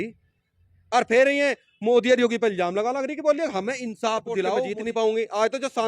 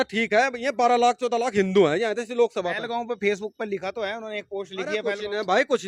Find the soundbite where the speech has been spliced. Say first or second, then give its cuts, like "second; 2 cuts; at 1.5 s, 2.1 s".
first; 1 cut; at 4.7 s